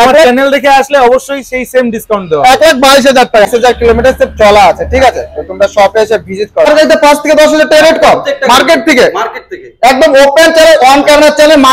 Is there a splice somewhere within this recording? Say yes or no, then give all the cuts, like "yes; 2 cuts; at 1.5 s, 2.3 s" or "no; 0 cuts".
yes; 2 cuts; at 3.5 s, 6.7 s